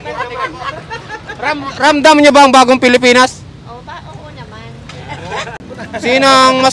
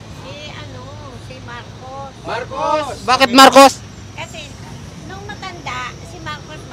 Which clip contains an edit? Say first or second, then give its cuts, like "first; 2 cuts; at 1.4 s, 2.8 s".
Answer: first; 1 cut; at 5.5 s